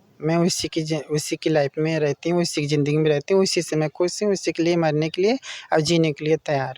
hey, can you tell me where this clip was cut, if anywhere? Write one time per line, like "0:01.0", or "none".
none